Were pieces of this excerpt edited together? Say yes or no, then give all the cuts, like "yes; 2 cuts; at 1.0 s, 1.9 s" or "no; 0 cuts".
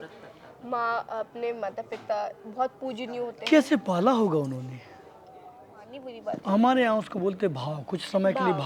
yes; 1 cut; at 6.0 s